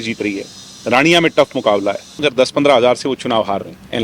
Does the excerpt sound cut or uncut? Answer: cut